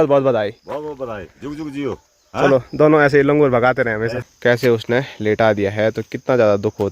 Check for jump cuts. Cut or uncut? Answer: cut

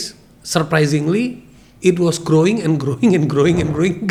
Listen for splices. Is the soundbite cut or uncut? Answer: uncut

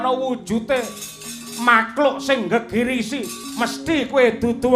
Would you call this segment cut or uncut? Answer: cut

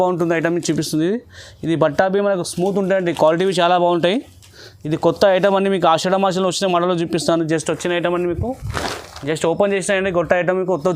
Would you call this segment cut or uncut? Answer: uncut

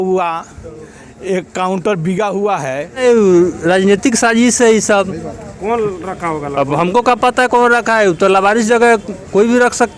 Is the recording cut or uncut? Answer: cut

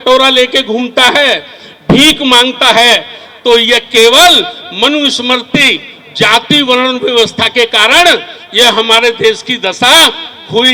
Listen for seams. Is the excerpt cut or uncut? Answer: uncut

